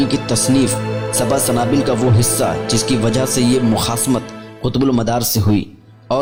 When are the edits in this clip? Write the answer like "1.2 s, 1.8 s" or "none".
none